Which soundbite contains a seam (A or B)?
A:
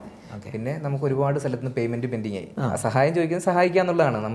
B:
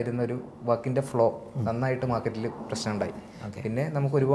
A